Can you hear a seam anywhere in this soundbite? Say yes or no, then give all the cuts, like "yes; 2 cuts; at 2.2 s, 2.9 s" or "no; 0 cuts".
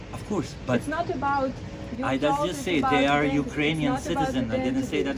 no; 0 cuts